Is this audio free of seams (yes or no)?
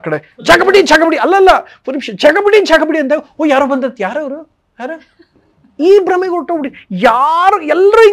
yes